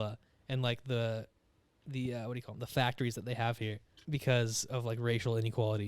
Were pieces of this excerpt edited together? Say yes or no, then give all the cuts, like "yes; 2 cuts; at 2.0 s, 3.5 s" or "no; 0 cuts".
yes; 1 cut; at 3.9 s